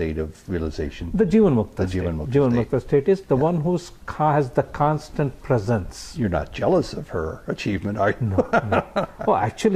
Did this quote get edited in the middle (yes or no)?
no